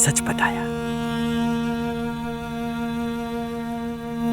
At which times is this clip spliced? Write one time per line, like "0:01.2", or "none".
none